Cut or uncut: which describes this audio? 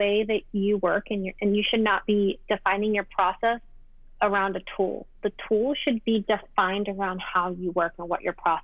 uncut